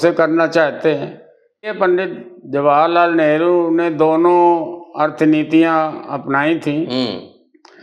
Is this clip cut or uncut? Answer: cut